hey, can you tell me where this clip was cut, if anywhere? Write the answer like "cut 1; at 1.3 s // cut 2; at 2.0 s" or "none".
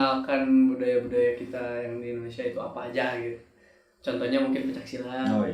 none